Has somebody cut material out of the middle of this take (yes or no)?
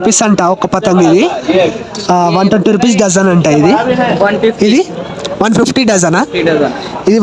no